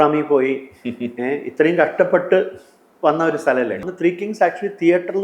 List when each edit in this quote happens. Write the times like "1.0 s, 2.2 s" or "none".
3.9 s